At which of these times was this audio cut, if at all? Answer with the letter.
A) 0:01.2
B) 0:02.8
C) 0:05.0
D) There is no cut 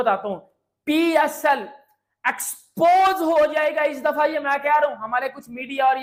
D